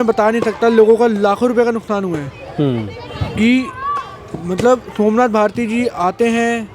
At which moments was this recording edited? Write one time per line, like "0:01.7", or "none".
none